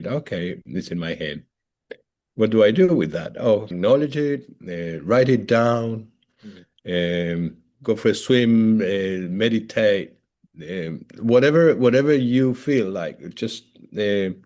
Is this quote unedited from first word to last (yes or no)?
no